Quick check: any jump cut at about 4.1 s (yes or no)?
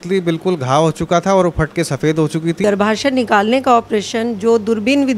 no